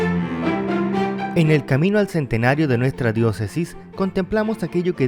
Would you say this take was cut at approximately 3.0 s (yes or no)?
no